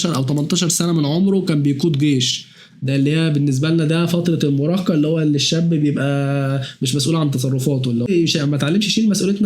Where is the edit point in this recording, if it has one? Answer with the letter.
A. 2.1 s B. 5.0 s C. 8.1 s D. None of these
C